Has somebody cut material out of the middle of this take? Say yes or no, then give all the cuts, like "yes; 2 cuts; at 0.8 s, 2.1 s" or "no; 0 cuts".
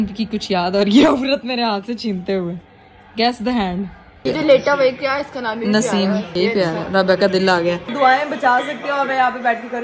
yes; 2 cuts; at 4.2 s, 7.9 s